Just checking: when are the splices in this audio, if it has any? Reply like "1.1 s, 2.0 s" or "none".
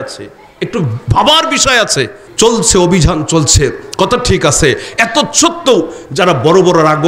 2.2 s